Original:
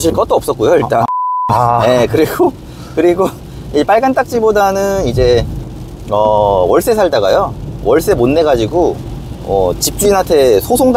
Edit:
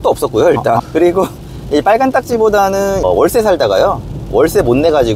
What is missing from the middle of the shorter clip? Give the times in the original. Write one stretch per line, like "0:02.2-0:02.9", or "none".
0:01.1-0:02.9
0:05.1-0:06.6

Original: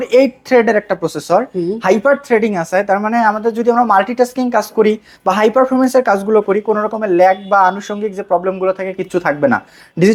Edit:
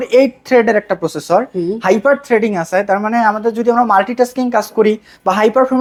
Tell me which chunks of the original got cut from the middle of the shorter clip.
none

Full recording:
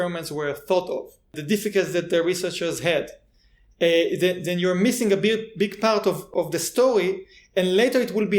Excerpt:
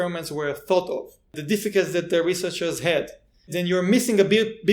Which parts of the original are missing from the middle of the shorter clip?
0:03.5-0:04.4

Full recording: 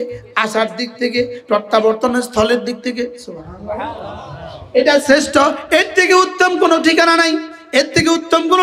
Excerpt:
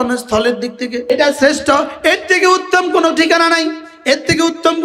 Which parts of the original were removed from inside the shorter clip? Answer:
0:03.1-0:04.7

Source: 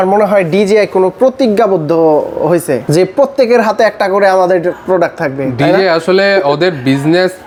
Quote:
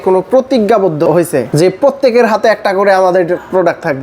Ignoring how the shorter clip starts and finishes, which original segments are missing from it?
0:01.9-0:02.4

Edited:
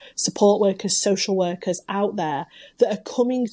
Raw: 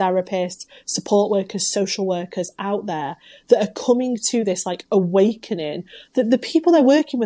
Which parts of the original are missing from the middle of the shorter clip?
none

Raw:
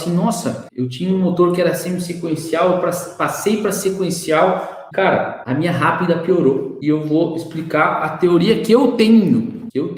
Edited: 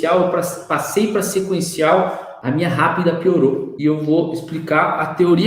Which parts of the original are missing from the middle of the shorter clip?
0:04.8-0:05.3

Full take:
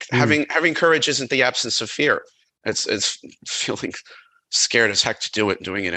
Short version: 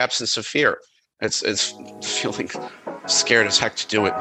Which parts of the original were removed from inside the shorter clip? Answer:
none

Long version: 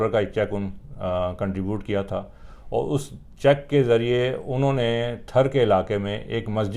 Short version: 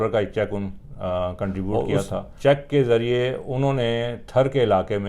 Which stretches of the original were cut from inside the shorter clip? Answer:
0:01.7-0:02.7

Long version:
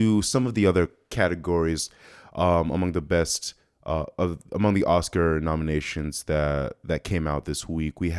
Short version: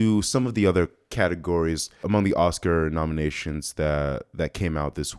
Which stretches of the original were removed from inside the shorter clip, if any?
0:01.9-0:04.4

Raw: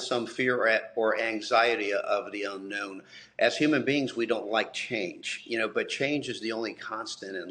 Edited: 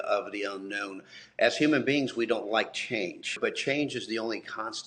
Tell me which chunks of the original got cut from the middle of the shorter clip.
0:05.4-0:05.7

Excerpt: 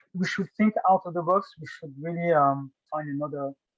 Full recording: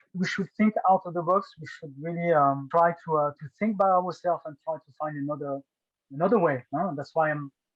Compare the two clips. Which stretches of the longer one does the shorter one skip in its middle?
0:02.6-0:04.7

